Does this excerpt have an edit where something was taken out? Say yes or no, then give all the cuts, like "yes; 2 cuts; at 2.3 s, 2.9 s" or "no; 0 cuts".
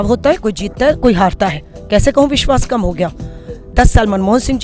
no; 0 cuts